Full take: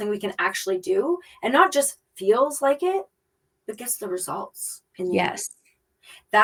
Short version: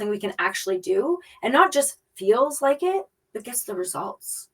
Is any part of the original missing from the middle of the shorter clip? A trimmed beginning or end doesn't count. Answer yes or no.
yes